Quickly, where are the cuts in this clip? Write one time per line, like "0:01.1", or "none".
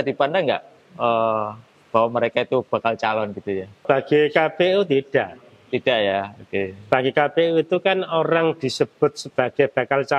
0:03.8

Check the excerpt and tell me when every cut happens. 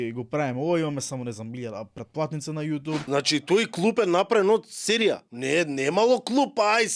0:03.0
0:05.3

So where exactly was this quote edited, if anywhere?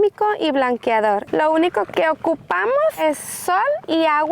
0:01.2
0:03.0

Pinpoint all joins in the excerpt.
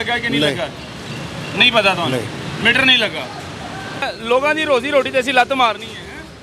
0:04.1

